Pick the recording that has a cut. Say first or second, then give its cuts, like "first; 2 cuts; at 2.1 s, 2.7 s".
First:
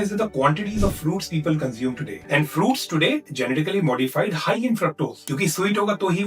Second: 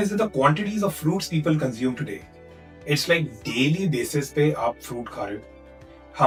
first; 2 cuts; at 2.1 s, 5.2 s